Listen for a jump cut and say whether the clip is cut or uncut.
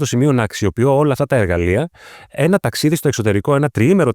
uncut